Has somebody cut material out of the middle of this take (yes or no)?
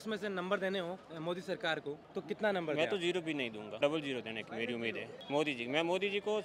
yes